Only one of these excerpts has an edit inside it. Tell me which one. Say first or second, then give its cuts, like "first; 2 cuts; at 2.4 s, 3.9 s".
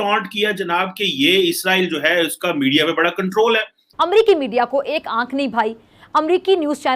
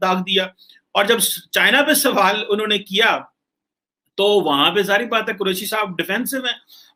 first; 1 cut; at 3.8 s